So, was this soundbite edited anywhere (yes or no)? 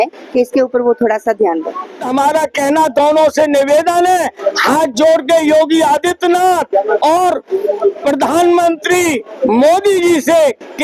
yes